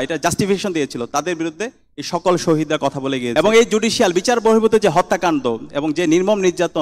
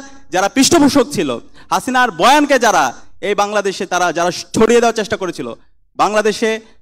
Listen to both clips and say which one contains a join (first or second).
first